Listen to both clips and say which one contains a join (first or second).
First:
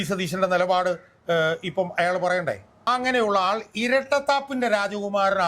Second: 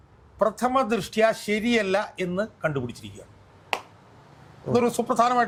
first